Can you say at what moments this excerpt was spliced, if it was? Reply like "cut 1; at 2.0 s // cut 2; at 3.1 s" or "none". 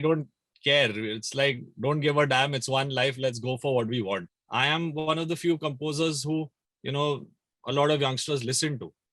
cut 1; at 4.4 s